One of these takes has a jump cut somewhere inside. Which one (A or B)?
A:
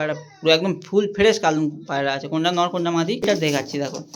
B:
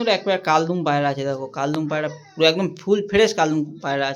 A